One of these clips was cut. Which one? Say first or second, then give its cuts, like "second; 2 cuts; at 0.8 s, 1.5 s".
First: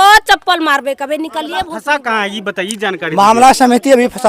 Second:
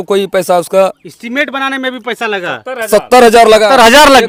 first; 1 cut; at 1.8 s